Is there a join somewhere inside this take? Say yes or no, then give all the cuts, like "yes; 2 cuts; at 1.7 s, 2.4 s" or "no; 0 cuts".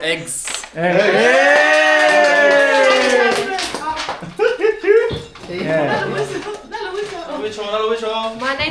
no; 0 cuts